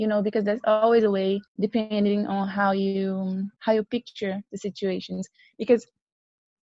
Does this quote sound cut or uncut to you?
cut